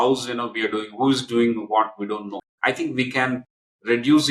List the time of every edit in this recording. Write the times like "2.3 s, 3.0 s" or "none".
none